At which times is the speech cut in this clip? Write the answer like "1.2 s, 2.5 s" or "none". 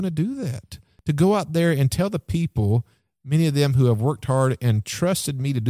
0.9 s

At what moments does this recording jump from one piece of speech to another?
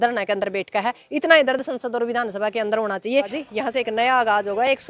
3.4 s

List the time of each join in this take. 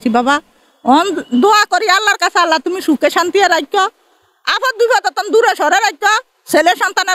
none

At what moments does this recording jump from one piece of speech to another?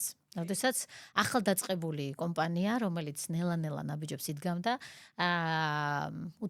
none

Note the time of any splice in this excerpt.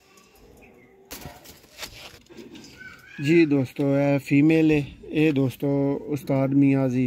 1.1 s

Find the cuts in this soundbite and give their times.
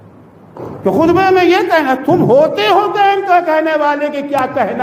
none

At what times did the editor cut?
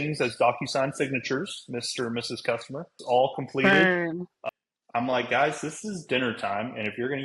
2.9 s, 4.4 s

